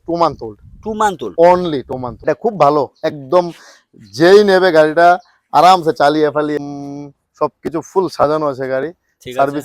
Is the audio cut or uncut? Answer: cut